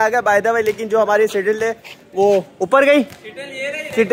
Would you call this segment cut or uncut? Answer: uncut